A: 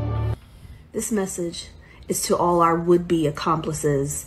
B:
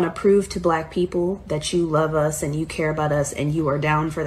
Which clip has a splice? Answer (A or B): B